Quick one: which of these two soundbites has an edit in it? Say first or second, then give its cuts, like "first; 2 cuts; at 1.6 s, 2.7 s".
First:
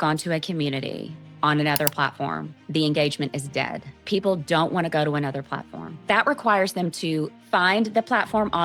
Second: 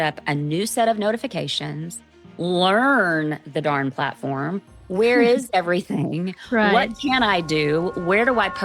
first; 3 cuts; at 4.0 s, 6.0 s, 7.4 s